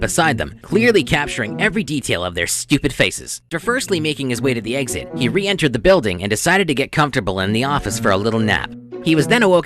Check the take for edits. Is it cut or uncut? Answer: cut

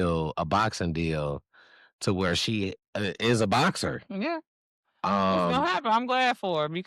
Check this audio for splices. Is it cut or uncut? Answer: uncut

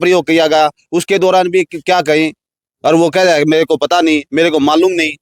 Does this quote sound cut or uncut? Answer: uncut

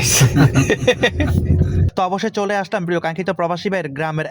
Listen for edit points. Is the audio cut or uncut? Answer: cut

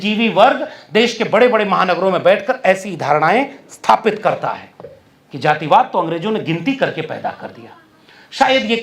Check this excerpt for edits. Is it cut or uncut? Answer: uncut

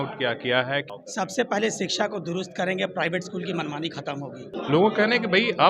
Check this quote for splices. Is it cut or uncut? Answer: cut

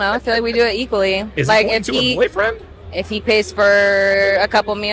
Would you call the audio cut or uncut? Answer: cut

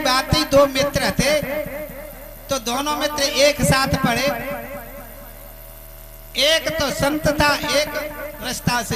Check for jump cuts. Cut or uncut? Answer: uncut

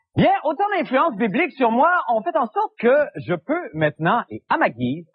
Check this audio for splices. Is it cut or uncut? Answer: cut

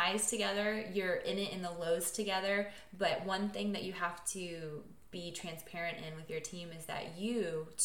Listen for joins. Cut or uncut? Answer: uncut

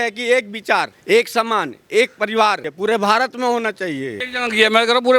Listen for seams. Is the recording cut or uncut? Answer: cut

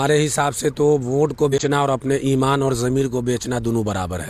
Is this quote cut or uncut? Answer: cut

